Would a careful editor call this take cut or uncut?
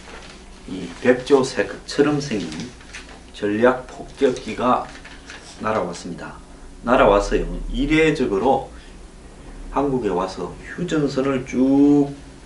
uncut